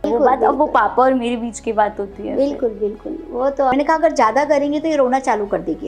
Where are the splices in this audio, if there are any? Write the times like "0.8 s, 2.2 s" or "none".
3.7 s